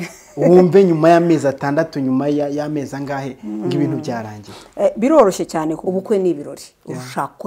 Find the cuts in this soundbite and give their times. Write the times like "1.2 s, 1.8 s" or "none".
5.8 s